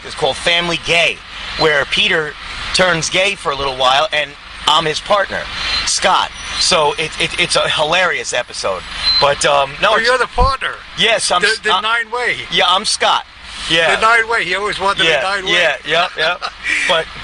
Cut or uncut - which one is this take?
uncut